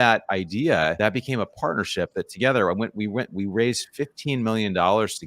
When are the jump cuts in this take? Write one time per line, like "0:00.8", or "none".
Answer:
0:01.0